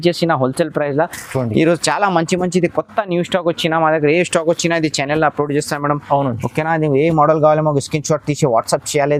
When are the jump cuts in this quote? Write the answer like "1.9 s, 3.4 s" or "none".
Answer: none